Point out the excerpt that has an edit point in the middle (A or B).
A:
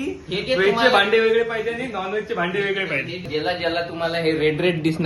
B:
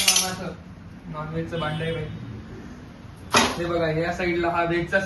A